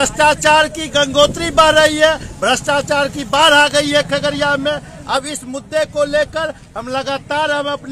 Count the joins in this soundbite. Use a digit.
0